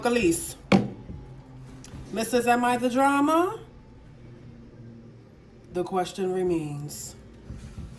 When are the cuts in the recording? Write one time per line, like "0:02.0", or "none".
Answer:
none